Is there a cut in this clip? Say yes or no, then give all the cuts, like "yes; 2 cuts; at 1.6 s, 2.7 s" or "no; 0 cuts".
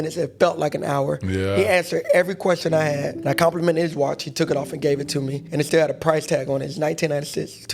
yes; 2 cuts; at 3.2 s, 5.4 s